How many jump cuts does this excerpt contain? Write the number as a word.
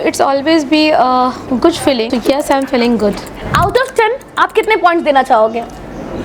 two